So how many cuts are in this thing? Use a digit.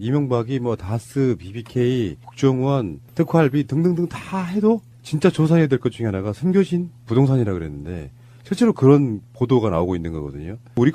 1